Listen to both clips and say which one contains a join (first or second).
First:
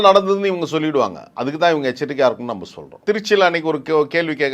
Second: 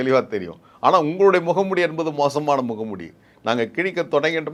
first